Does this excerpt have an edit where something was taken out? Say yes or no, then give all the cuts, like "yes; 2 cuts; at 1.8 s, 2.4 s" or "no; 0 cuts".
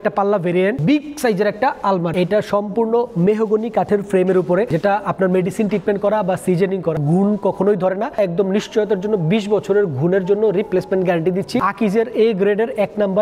yes; 6 cuts; at 0.8 s, 2.1 s, 4.7 s, 7.0 s, 8.2 s, 11.6 s